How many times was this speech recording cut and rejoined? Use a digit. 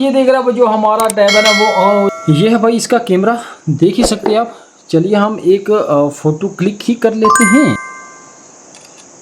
2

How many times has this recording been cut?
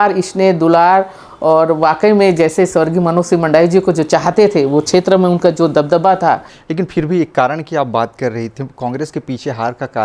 1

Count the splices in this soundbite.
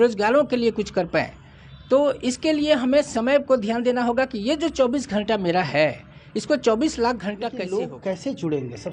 1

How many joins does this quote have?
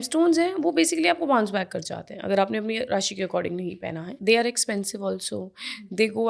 1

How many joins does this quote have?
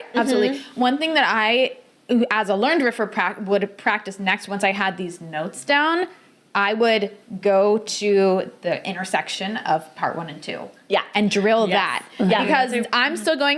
0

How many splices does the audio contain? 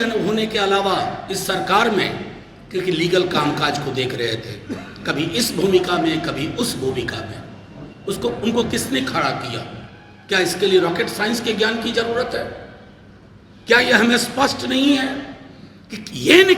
0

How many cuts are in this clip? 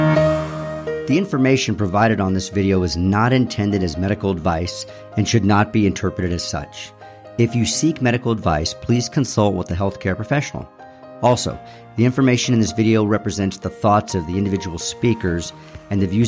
1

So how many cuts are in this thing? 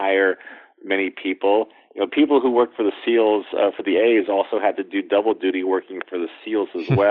0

